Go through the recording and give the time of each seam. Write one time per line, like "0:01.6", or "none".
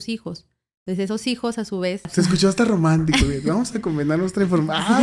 0:02.1